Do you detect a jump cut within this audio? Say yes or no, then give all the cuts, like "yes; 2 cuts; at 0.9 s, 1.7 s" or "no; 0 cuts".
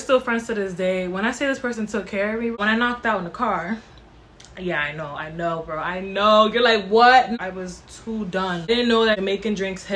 yes; 2 cuts; at 2.6 s, 8.7 s